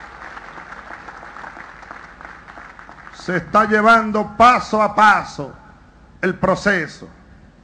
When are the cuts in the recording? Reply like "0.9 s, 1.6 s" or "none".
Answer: 3.3 s